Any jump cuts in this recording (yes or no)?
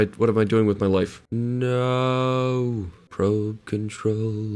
yes